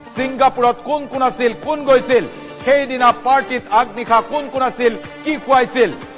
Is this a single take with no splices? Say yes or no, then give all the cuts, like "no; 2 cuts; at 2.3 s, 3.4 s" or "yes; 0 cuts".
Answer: no; 1 cut; at 3.2 s